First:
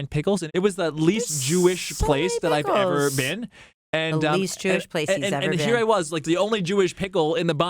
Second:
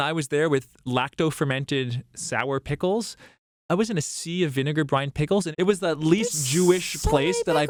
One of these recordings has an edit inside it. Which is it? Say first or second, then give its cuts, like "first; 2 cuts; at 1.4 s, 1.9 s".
first; 1 cut; at 6.2 s